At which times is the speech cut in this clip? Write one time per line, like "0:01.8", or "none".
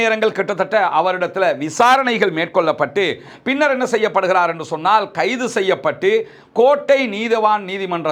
none